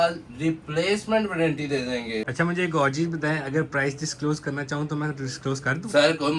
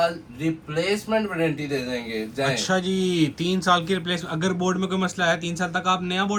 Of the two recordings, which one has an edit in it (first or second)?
first